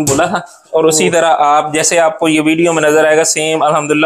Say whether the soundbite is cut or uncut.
uncut